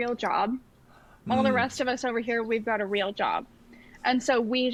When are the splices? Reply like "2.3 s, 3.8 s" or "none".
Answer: none